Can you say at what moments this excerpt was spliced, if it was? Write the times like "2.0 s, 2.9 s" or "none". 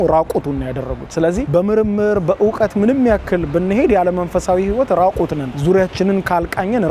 none